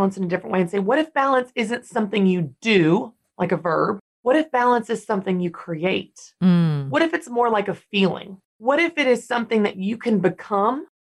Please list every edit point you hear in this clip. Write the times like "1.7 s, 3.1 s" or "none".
3.2 s